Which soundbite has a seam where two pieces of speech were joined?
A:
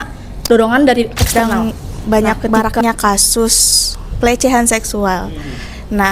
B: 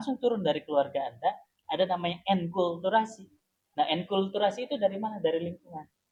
A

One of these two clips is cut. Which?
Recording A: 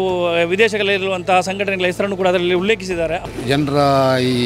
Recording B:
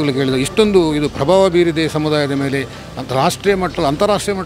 A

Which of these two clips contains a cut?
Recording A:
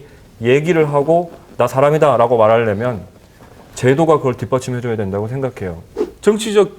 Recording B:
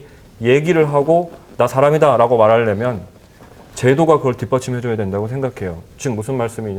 A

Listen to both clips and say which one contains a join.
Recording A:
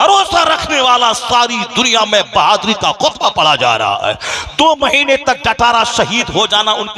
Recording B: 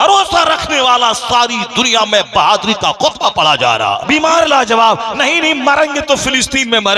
B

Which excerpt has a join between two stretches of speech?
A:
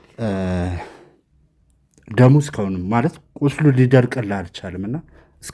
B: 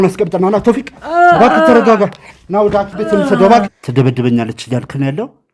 B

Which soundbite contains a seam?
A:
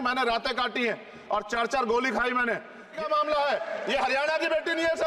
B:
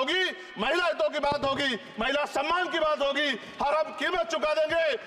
A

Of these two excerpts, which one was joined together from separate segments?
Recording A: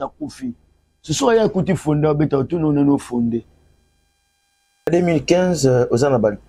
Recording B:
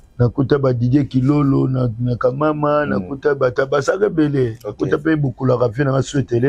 A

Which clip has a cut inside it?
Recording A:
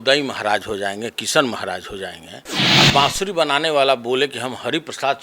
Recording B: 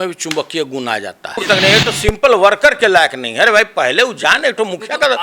B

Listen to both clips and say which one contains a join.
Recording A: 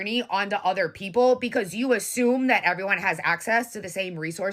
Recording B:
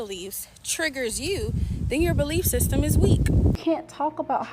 B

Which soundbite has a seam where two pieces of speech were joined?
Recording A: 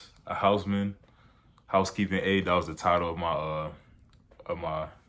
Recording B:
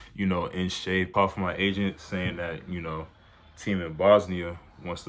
B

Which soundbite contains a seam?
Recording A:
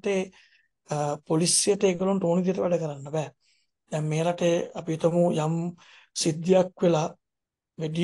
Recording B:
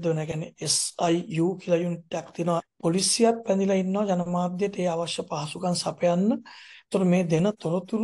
B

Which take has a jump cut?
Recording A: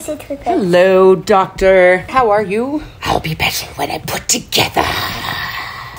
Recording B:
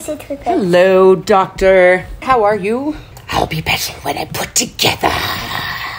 A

